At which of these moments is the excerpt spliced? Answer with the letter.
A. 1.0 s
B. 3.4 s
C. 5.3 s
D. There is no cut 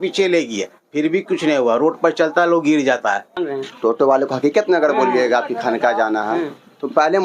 B